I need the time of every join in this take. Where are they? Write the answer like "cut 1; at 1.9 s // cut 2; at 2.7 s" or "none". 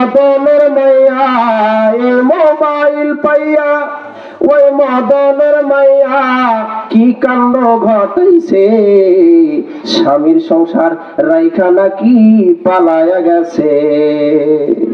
none